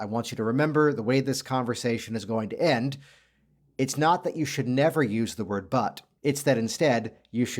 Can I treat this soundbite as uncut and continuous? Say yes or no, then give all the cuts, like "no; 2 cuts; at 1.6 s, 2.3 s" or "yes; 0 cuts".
no; 1 cut; at 6.1 s